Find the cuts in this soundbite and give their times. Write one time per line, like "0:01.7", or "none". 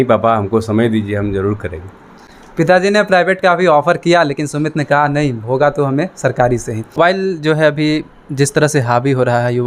none